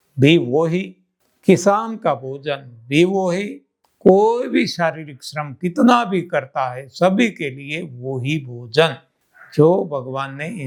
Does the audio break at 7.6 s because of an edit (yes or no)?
no